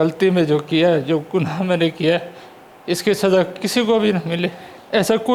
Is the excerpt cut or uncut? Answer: uncut